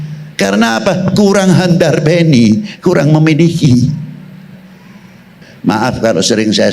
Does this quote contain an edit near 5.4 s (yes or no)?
yes